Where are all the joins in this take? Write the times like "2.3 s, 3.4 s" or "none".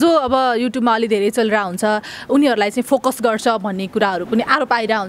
none